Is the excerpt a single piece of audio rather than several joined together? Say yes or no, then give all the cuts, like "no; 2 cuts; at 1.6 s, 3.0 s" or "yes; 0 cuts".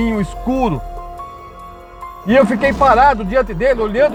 yes; 0 cuts